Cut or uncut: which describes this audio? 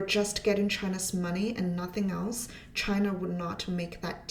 uncut